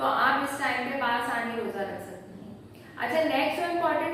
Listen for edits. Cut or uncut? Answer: uncut